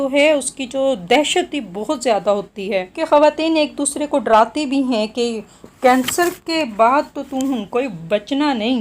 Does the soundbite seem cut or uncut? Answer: cut